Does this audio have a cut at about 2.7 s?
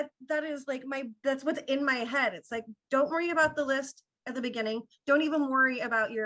no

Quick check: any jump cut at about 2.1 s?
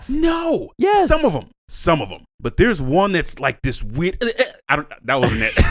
yes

